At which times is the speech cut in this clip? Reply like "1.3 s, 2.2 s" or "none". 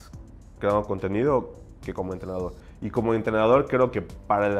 none